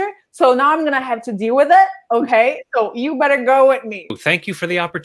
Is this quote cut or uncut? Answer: uncut